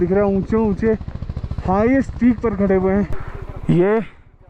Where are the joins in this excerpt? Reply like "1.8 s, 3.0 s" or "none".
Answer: 3.2 s